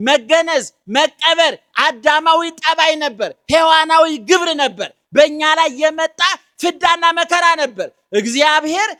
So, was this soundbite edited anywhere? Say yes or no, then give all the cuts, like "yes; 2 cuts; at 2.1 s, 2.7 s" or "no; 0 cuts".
no; 0 cuts